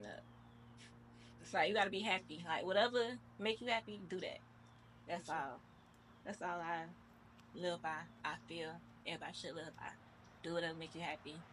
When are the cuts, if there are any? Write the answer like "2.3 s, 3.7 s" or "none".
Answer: none